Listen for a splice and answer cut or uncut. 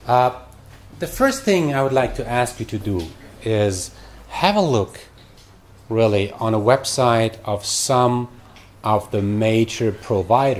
cut